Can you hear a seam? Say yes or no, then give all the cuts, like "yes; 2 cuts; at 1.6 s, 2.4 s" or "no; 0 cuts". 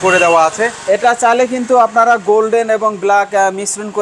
no; 0 cuts